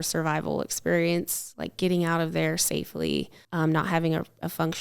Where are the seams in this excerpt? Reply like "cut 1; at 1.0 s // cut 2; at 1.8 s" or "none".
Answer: cut 1; at 3.4 s